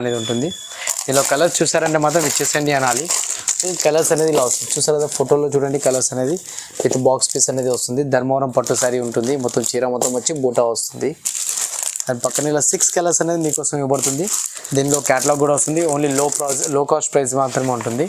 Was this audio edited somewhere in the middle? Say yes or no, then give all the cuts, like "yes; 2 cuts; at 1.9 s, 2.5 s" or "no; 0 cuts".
no; 0 cuts